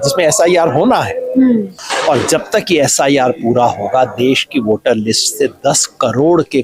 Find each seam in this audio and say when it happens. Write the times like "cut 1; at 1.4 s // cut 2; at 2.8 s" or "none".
cut 1; at 1.8 s